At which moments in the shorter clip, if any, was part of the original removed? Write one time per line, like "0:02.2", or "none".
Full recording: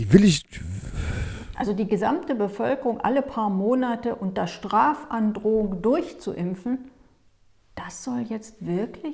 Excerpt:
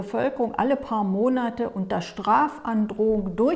none